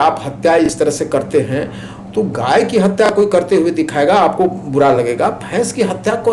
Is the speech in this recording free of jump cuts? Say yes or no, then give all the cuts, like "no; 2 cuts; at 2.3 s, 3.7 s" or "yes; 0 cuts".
yes; 0 cuts